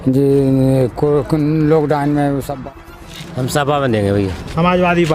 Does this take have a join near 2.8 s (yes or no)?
yes